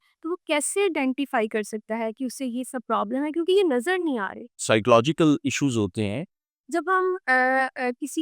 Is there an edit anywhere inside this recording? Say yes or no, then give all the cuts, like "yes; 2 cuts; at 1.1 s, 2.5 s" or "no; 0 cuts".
yes; 2 cuts; at 4.5 s, 6.5 s